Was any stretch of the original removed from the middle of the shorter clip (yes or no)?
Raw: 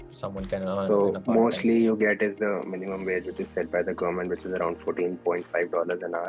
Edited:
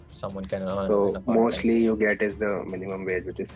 no